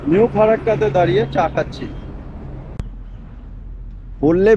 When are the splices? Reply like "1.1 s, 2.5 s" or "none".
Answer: 2.8 s